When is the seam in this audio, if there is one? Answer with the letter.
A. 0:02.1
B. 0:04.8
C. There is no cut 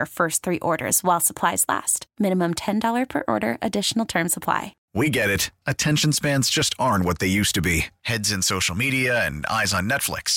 B